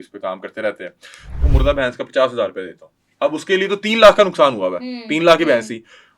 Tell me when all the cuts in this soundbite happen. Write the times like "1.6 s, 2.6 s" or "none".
1.5 s